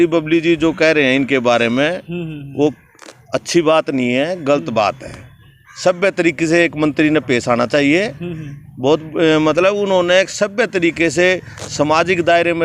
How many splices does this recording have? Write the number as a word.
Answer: zero